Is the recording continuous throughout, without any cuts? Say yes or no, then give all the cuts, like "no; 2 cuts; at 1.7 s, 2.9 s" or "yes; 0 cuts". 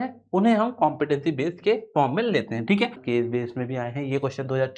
no; 1 cut; at 3.0 s